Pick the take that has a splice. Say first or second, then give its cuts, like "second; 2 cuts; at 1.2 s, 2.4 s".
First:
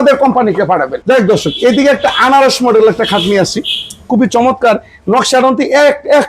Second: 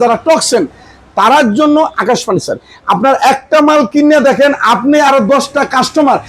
first; 1 cut; at 0.9 s